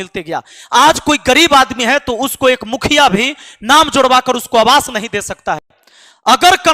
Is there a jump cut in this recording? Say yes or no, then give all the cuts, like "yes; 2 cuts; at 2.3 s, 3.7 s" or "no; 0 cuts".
yes; 1 cut; at 5.8 s